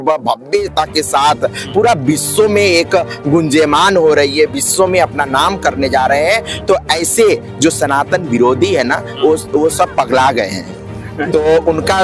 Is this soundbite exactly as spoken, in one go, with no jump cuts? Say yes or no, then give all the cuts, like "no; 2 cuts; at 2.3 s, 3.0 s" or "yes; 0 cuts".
yes; 0 cuts